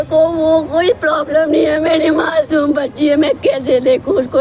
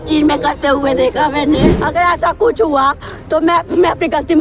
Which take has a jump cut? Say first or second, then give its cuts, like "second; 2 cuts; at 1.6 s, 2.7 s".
second; 1 cut; at 1.7 s